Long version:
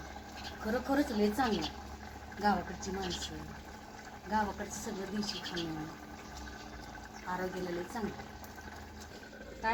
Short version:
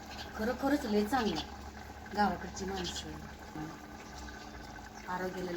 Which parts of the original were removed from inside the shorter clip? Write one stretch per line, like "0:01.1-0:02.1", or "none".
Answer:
0:03.8-0:05.7